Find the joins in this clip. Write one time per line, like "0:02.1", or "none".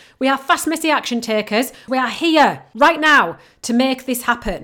0:01.8
0:02.6